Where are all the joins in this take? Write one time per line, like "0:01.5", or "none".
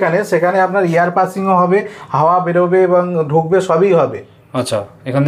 none